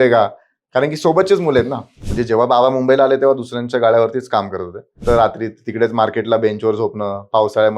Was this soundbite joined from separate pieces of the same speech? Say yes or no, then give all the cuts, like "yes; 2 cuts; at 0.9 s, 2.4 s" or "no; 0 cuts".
yes; 2 cuts; at 2.1 s, 5.0 s